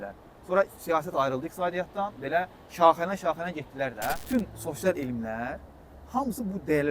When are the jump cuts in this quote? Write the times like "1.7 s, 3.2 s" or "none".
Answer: 4.2 s